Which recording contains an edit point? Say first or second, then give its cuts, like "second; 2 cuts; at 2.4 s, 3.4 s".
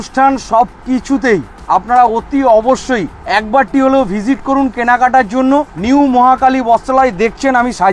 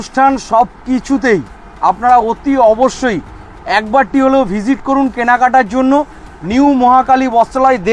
first; 3 cuts; at 1.5 s, 3.1 s, 5.7 s